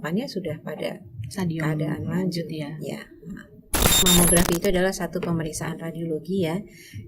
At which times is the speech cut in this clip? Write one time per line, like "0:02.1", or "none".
0:04.0